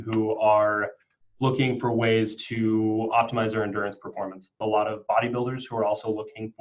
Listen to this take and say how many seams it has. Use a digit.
1